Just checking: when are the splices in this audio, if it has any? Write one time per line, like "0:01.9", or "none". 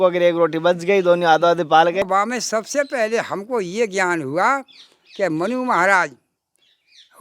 0:02.0